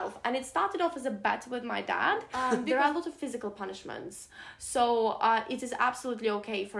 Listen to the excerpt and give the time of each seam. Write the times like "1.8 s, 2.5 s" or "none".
2.5 s